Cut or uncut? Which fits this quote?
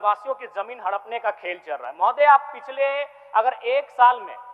uncut